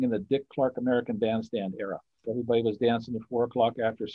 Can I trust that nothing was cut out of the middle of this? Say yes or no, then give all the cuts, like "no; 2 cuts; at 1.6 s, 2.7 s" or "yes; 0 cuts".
no; 1 cut; at 2.2 s